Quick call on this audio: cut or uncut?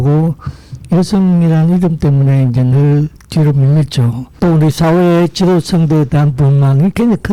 cut